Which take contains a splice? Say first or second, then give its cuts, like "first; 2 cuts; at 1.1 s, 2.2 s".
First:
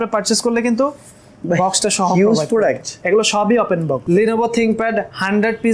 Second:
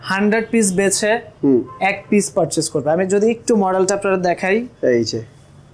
first; 2 cuts; at 2.9 s, 4.0 s